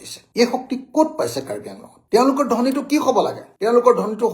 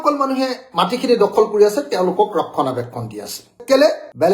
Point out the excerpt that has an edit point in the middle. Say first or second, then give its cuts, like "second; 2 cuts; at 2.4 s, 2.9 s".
first; 1 cut; at 1.9 s